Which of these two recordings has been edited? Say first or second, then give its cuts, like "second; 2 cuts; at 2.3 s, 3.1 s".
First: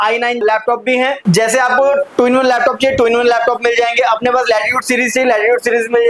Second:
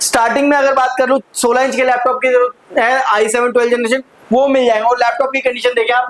first; 1 cut; at 1.2 s